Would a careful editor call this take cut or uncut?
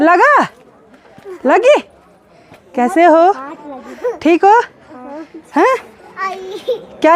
uncut